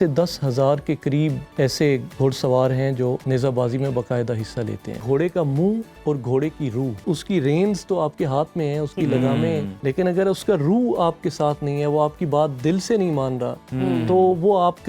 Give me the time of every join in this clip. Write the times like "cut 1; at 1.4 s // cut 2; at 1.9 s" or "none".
cut 1; at 1.4 s // cut 2; at 3.2 s // cut 3; at 5.0 s // cut 4; at 5.9 s // cut 5; at 7.0 s // cut 6; at 9.7 s